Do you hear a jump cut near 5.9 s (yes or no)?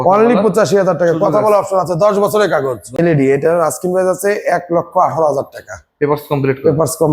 no